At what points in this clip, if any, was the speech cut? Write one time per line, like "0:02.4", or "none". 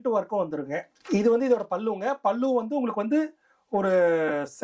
0:00.9